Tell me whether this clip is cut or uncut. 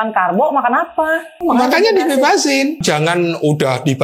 cut